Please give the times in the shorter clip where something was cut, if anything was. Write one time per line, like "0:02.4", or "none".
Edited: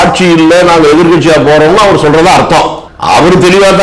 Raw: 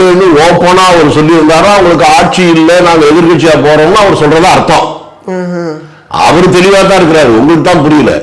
0:02.9